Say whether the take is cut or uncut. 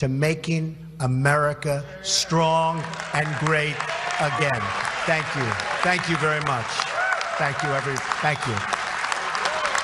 uncut